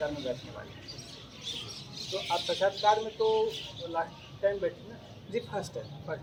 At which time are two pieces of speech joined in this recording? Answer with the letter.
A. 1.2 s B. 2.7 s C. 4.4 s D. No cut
D